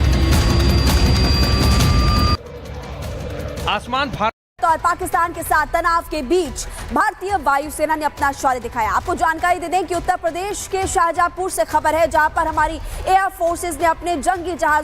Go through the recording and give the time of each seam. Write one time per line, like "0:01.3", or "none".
0:04.4